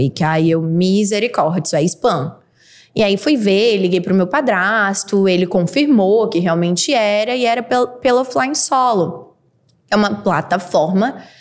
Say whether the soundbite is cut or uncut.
uncut